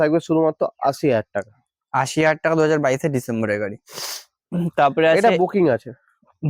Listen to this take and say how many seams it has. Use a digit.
0